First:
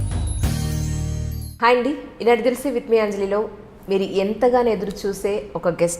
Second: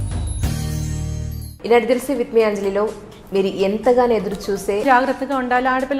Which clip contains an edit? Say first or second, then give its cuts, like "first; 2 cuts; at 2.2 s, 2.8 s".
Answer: second; 2 cuts; at 1.5 s, 4.8 s